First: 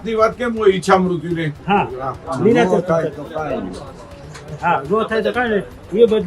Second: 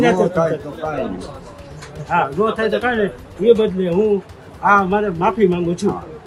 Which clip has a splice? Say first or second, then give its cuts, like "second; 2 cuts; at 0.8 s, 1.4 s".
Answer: first; 1 cut; at 1.5 s